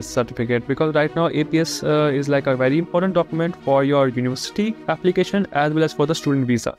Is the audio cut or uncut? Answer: uncut